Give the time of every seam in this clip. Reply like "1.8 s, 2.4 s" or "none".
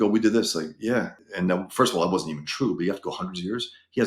1.2 s